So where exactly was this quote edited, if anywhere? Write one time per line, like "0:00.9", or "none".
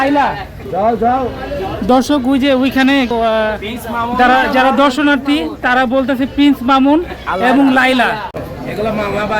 0:08.4